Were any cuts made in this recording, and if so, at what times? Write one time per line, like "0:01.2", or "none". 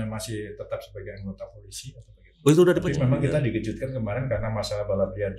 0:02.8